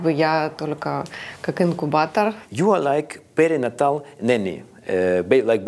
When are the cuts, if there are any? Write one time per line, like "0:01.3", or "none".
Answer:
0:02.4